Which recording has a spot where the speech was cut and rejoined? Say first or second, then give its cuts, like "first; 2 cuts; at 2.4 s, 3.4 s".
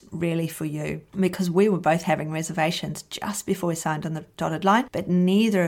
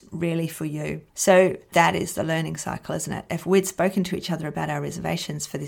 second; 2 cuts; at 1.1 s, 1.6 s